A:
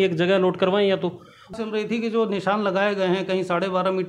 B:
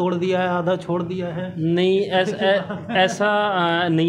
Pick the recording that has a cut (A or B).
A